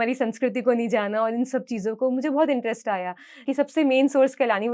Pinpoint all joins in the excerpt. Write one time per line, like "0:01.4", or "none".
0:03.4